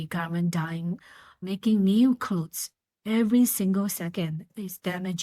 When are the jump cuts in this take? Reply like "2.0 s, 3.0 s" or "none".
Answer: 1.4 s